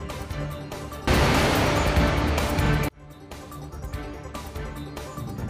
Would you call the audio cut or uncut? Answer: cut